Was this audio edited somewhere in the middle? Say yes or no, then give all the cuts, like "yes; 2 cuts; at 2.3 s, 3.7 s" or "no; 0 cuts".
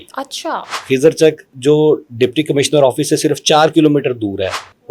no; 0 cuts